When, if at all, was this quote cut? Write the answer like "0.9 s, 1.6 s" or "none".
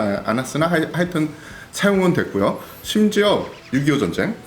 3.6 s